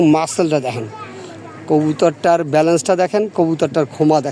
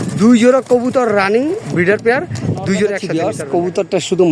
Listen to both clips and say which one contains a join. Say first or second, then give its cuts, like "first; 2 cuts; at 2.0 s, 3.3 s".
second; 1 cut; at 3.1 s